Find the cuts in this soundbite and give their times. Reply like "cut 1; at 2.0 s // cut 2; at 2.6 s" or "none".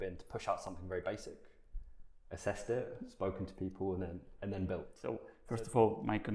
cut 1; at 5.3 s